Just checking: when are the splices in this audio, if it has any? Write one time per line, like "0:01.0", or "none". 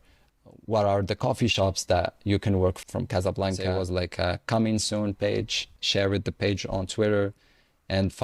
0:03.6